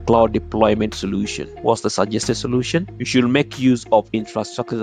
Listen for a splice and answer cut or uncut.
cut